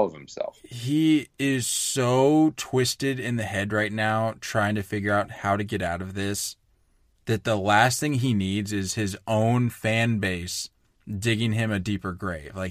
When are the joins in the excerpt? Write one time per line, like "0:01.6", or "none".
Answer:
none